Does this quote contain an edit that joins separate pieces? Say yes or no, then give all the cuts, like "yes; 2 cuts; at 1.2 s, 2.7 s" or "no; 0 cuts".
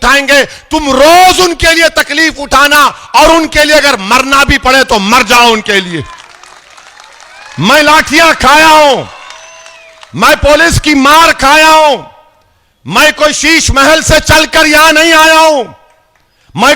no; 0 cuts